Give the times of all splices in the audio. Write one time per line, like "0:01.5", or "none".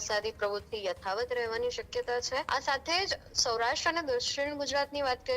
0:02.5

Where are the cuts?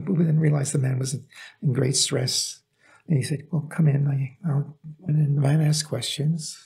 0:05.0

